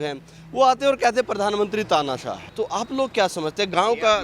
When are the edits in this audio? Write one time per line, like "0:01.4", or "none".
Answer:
0:02.4